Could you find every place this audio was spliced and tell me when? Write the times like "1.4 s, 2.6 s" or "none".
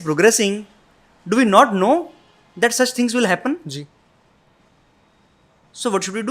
none